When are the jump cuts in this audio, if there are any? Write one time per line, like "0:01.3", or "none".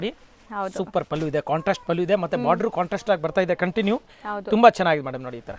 none